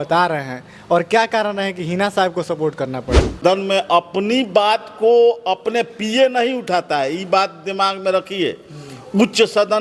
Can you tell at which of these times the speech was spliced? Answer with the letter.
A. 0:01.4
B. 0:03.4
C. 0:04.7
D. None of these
B